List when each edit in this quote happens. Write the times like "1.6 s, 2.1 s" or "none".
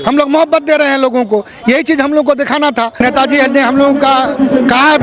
3.0 s